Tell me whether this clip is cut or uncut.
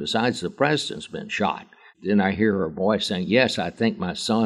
cut